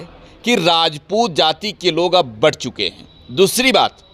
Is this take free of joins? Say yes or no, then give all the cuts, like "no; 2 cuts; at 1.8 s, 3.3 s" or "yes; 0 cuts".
yes; 0 cuts